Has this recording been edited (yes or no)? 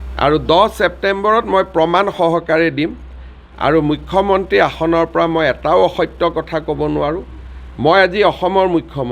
no